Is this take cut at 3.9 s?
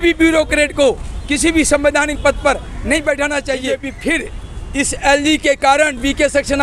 yes; 1 cut; at 3.9 s

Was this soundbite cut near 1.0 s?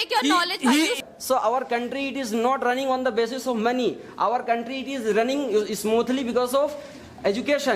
yes; 1 cut; at 1.0 s

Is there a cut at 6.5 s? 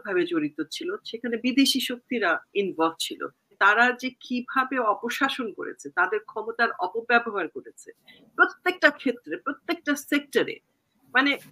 no; 1 cut; at 3.6 s

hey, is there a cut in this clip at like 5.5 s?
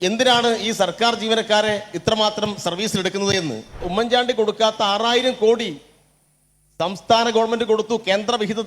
no; 1 cut; at 3.9 s

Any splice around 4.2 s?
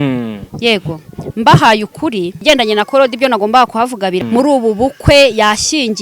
yes; 2 cuts; at 2.4 s, 4.2 s

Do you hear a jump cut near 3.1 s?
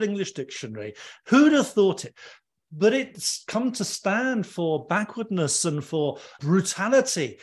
yes; 1 cut; at 3.1 s

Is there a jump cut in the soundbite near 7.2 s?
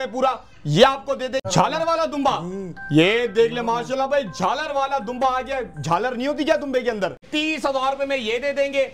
yes; 2 cuts; at 1.4 s, 7.2 s

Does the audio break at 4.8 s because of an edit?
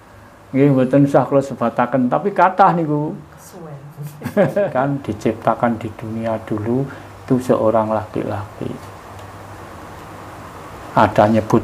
yes; 1 cut; at 4.8 s

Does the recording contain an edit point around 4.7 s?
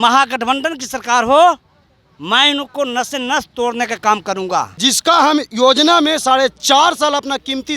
yes; 1 cut; at 4.7 s

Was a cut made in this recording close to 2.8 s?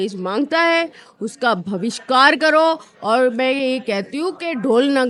no; 0 cuts

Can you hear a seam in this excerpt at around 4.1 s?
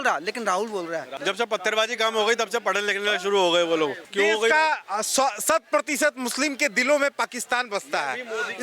yes; 2 cuts; at 1.2 s, 4.1 s

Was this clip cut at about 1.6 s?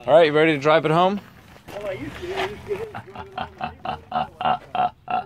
yes; 1 cut; at 1.6 s

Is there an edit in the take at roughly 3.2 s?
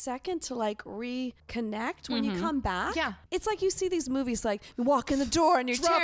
yes; 1 cut; at 3.2 s

